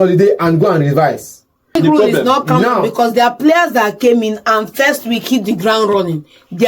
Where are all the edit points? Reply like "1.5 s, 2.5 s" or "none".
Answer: 1.7 s